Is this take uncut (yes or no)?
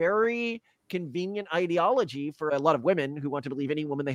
no